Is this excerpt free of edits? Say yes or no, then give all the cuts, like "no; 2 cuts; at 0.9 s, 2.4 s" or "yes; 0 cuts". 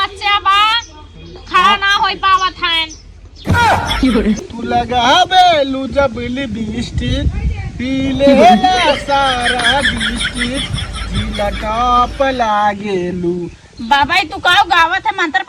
no; 1 cut; at 4.4 s